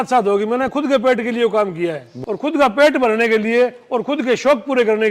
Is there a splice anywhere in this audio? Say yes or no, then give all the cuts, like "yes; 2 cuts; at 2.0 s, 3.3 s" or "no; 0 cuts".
yes; 1 cut; at 2.5 s